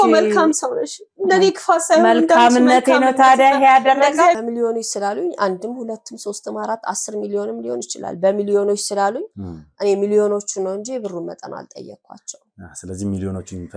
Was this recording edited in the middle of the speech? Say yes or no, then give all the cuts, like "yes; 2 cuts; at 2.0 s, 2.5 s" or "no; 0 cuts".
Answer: yes; 1 cut; at 4.4 s